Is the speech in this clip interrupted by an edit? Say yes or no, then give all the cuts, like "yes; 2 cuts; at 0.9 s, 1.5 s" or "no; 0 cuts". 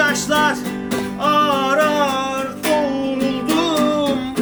no; 0 cuts